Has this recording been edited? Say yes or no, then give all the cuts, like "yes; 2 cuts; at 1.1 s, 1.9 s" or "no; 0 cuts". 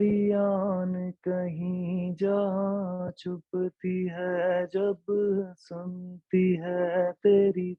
no; 0 cuts